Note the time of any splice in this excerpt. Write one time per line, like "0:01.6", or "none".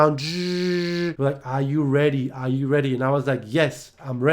0:01.1